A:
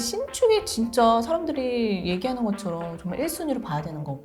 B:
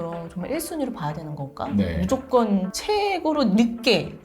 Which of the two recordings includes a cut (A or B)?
B